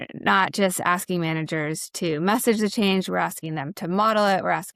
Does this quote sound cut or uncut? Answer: uncut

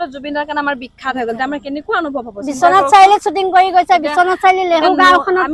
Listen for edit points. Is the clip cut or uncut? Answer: uncut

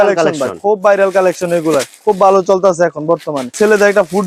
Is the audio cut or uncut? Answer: uncut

